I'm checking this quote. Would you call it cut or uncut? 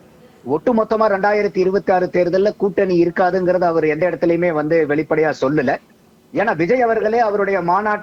uncut